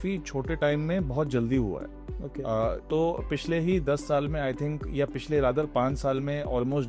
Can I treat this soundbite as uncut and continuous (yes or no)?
yes